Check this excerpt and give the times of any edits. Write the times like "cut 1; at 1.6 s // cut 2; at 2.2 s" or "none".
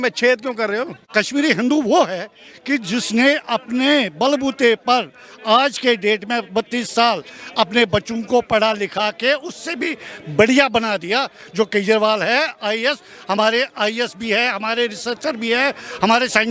cut 1; at 1.0 s